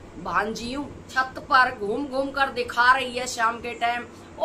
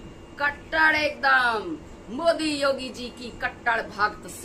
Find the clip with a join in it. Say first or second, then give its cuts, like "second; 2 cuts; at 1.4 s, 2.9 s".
first; 1 cut; at 1.1 s